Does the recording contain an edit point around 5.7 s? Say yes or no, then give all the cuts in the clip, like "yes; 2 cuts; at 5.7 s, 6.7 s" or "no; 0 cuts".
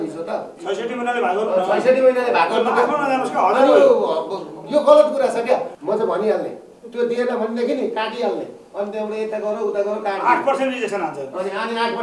yes; 1 cut; at 5.7 s